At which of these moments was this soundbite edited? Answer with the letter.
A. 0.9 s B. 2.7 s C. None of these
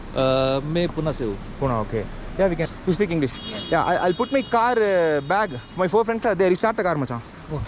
B